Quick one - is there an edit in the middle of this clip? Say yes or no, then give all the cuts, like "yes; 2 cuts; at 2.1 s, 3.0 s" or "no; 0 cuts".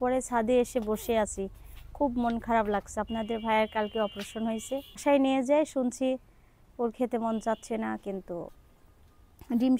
yes; 1 cut; at 5.0 s